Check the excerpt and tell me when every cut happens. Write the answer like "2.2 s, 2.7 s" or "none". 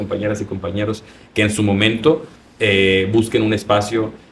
none